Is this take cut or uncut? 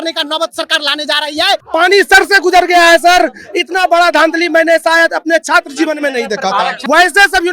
cut